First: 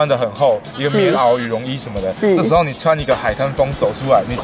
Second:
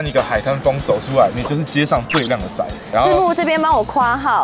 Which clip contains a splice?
second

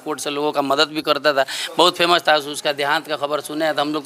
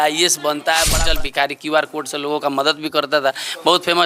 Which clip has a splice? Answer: second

